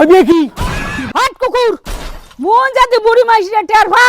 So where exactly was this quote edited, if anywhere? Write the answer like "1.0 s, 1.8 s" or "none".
1.0 s